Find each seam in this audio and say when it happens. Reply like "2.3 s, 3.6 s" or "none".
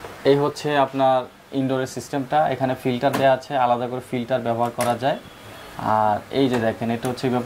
none